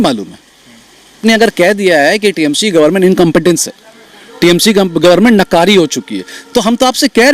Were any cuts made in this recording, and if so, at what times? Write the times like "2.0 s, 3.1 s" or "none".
1.2 s